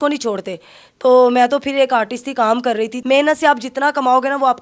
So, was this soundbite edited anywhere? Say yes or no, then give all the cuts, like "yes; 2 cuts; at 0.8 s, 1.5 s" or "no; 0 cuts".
yes; 1 cut; at 3.0 s